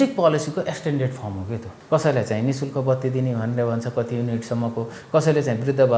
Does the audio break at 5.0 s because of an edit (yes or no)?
no